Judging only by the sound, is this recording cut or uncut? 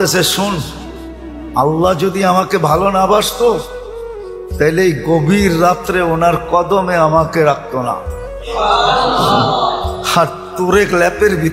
uncut